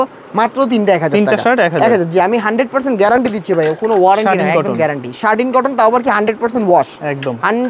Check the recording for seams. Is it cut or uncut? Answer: uncut